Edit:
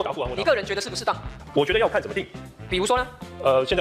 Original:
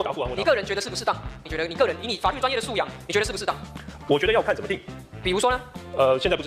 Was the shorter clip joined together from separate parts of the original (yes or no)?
yes